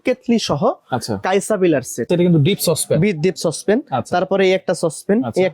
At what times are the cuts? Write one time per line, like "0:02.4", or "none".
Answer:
0:02.1